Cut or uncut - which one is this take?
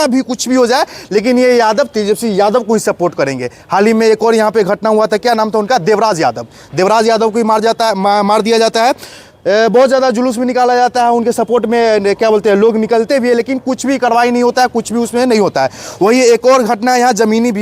uncut